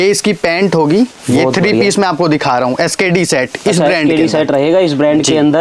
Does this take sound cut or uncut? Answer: uncut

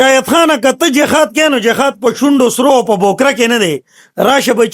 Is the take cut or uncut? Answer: uncut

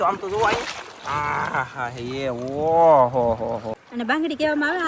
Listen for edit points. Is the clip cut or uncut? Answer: cut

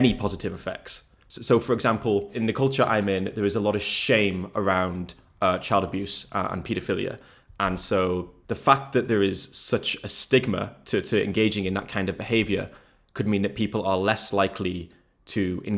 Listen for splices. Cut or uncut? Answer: cut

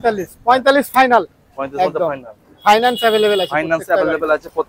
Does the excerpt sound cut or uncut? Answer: uncut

